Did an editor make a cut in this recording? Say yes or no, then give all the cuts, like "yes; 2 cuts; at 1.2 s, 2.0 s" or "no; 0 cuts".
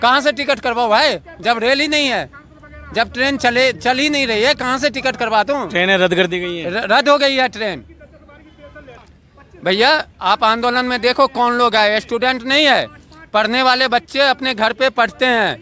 no; 0 cuts